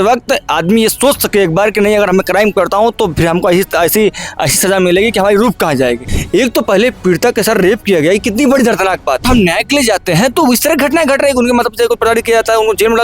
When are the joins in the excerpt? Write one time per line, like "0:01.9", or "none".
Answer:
0:06.1
0:09.2